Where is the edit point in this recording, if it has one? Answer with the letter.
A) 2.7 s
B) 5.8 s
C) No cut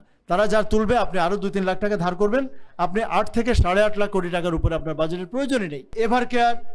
B